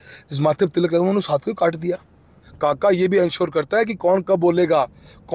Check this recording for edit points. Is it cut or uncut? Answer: cut